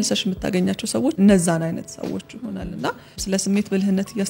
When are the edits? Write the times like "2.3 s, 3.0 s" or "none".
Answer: 1.2 s, 3.2 s